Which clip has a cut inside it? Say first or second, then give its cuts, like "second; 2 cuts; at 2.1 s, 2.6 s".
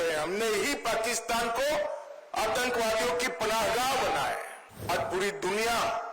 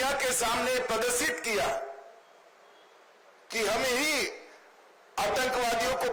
first; 1 cut; at 4.9 s